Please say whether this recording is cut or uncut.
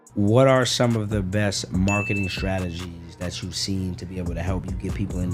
uncut